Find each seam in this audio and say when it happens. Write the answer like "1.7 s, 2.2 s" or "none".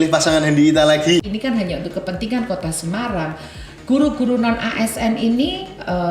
1.2 s